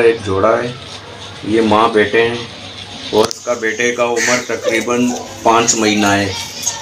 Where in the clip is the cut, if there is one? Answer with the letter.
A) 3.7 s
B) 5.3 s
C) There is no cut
C